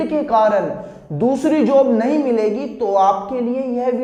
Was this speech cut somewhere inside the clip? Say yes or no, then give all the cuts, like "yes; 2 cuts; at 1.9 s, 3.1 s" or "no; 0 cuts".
no; 0 cuts